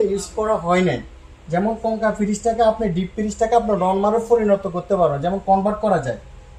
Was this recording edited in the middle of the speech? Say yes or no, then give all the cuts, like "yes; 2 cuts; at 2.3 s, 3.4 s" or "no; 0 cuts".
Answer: no; 0 cuts